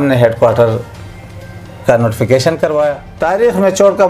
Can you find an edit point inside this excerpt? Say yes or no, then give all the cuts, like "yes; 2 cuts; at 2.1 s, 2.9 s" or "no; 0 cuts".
yes; 1 cut; at 3.1 s